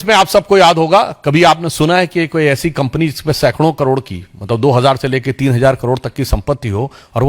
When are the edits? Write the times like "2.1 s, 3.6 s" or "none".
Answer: none